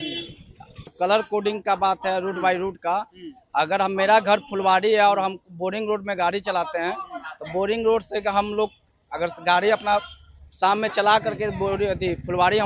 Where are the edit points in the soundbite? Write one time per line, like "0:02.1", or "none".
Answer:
0:00.9